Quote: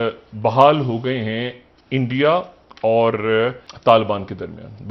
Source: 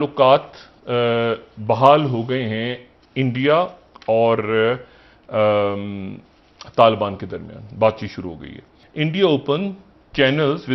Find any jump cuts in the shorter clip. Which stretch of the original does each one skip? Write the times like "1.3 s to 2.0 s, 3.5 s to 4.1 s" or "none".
4.9 s to 6.6 s